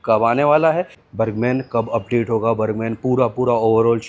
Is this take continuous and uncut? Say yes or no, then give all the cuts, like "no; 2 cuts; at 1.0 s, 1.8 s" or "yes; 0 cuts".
no; 1 cut; at 1.0 s